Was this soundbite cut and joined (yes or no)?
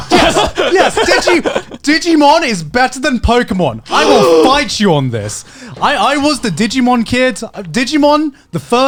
no